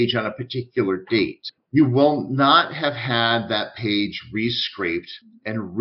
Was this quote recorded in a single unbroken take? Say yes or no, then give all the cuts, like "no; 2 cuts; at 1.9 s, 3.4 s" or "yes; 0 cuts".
no; 1 cut; at 1.5 s